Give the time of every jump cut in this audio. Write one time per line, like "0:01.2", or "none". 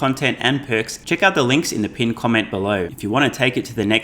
0:01.0
0:02.9